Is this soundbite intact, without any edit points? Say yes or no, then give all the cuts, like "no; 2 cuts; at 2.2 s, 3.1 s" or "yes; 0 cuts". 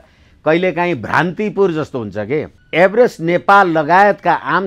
no; 1 cut; at 2.6 s